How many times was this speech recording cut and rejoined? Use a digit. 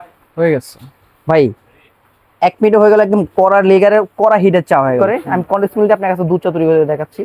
1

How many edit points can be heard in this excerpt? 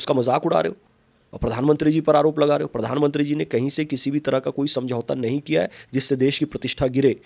0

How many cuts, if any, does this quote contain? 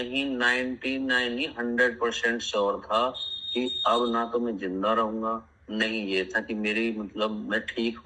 0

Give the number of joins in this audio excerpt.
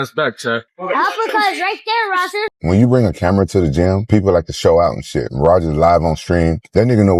1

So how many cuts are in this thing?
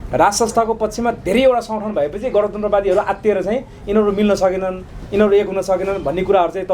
0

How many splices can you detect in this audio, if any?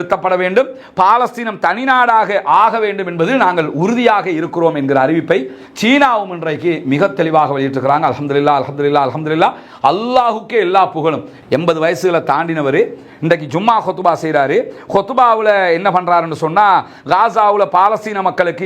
1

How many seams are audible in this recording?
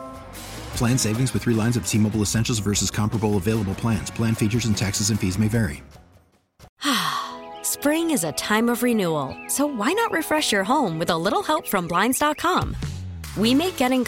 1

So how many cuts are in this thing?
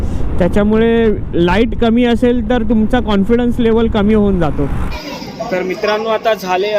1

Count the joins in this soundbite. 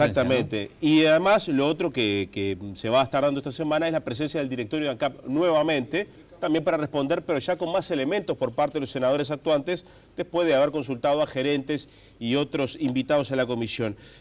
1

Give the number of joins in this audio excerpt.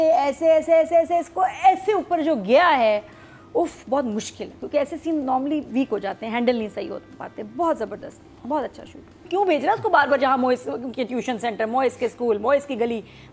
1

